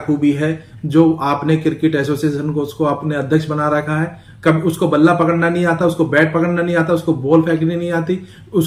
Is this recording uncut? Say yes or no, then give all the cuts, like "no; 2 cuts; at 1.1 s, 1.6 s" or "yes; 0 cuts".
yes; 0 cuts